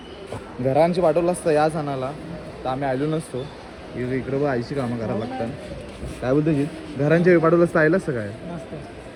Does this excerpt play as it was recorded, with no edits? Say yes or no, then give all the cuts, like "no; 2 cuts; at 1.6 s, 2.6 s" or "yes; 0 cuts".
yes; 0 cuts